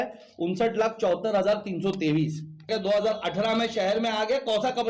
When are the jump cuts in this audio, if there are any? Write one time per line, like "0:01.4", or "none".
0:02.7